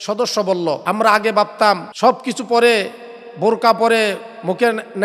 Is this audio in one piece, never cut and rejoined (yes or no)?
no